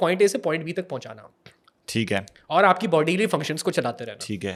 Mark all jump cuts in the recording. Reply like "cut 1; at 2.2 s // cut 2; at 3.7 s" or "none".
none